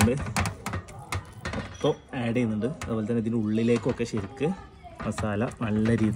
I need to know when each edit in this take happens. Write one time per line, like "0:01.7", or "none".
none